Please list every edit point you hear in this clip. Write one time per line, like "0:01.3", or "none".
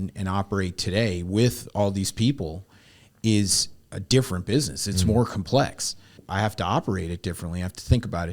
0:06.2